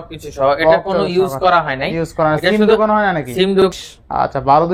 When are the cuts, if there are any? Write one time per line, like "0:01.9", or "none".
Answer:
0:03.7